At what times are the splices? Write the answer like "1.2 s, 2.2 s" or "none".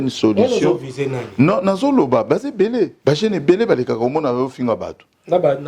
3.0 s